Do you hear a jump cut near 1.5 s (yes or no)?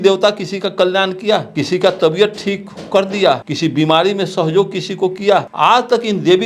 yes